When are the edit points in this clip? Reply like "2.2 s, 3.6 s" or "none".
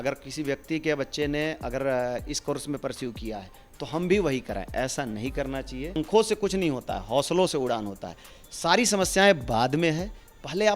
6.0 s

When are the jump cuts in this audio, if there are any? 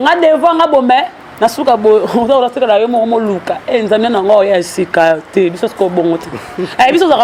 none

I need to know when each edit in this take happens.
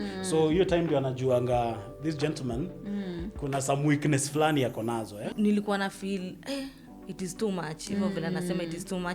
5.3 s

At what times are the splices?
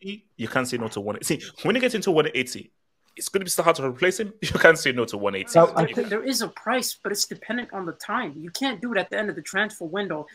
5.9 s

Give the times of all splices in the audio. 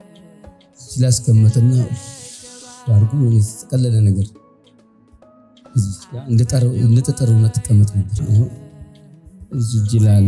8.2 s

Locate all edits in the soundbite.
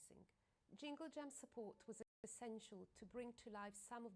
none

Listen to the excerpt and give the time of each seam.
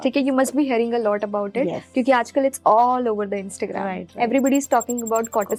none

